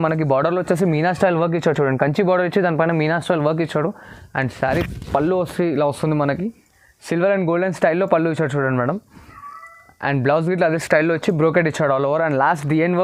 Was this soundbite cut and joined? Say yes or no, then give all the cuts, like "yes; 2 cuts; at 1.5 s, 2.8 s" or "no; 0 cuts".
no; 0 cuts